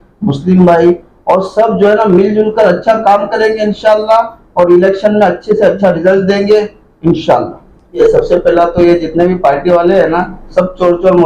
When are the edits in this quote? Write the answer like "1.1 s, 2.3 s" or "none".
8.0 s

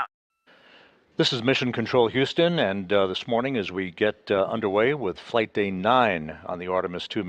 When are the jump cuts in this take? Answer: 4.4 s

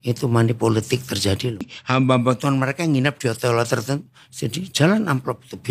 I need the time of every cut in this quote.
1.8 s

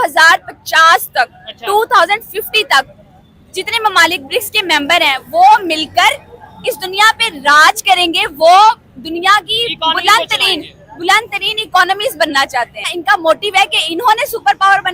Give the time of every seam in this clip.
12.9 s

